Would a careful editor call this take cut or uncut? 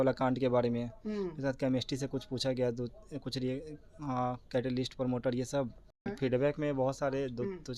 cut